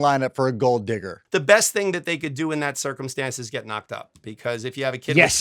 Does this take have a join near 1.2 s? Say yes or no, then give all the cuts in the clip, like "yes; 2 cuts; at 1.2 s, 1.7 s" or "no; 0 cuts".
yes; 1 cut; at 1.2 s